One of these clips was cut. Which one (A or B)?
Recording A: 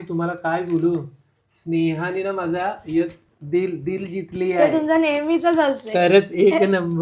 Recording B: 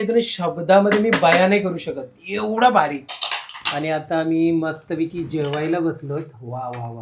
B